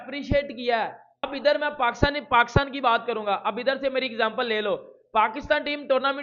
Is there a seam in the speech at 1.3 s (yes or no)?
yes